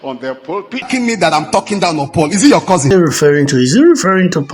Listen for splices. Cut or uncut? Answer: cut